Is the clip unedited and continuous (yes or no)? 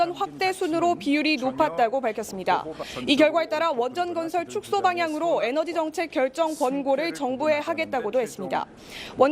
no